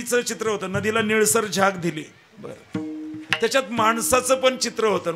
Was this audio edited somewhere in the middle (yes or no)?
no